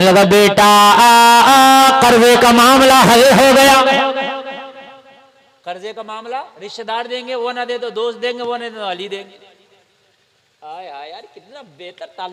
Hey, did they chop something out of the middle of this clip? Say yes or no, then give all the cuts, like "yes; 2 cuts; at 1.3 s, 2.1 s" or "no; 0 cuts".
no; 0 cuts